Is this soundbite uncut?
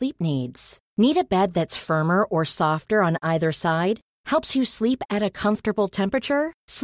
yes; 0 cuts

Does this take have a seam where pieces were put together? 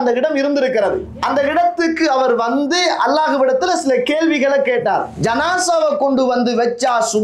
yes; 2 cuts; at 1.1 s, 5.1 s

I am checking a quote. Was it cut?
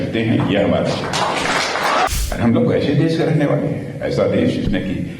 yes; 1 cut; at 2.1 s

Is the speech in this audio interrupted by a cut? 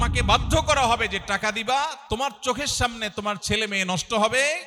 no; 0 cuts

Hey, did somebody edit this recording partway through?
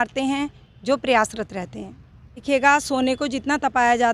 yes; 1 cut; at 2.4 s

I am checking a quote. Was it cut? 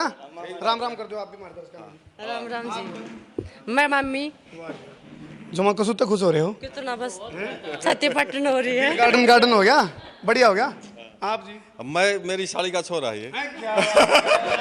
no; 0 cuts

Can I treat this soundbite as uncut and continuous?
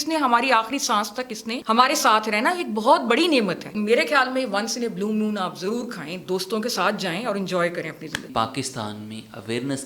no; 3 cuts; at 1.5 s, 3.7 s, 8.3 s

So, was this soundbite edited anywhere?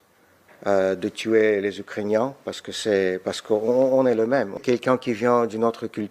yes; 1 cut; at 4.6 s

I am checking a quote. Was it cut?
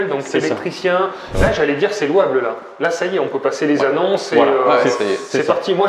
yes; 1 cut; at 1.3 s

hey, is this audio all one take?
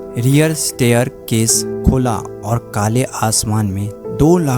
yes; 0 cuts

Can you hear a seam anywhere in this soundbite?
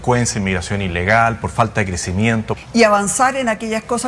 yes; 1 cut; at 2.5 s

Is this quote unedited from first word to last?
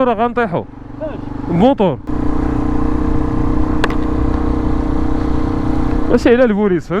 yes; 0 cuts

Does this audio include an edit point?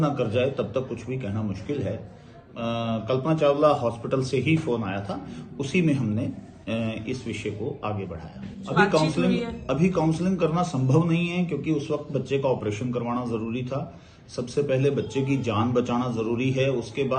yes; 2 cuts; at 2.5 s, 8.6 s

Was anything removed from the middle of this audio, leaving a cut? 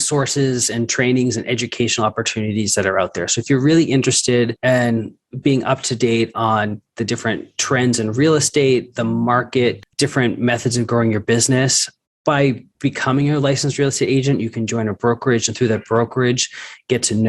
yes; 3 cuts; at 4.6 s, 9.9 s, 12.7 s

